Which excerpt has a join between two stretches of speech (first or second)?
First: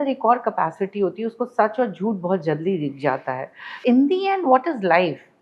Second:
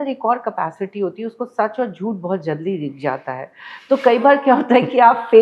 first